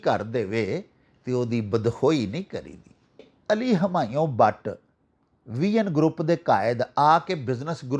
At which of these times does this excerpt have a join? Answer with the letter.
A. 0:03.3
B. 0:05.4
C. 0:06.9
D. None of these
A